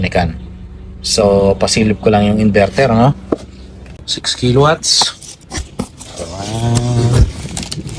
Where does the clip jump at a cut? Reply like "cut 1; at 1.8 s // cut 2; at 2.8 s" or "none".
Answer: none